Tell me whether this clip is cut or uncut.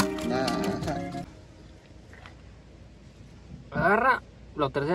cut